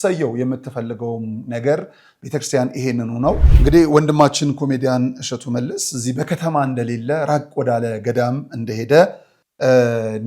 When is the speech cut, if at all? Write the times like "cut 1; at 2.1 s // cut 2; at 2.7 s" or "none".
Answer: cut 1; at 3.5 s